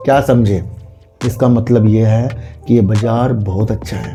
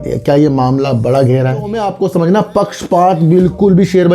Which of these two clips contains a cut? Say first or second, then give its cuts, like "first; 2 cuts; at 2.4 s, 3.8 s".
second; 1 cut; at 1.8 s